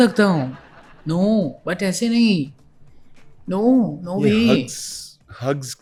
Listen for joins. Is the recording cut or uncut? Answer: uncut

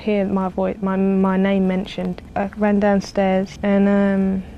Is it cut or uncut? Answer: cut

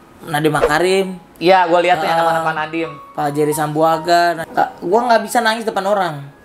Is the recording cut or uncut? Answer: cut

